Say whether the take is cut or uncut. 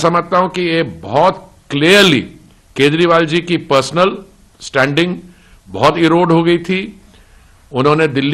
uncut